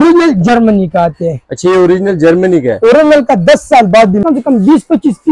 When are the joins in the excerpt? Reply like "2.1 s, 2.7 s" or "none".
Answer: 4.2 s